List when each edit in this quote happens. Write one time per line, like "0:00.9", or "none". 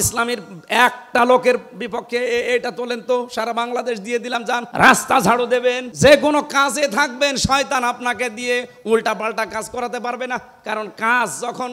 0:04.7
0:05.9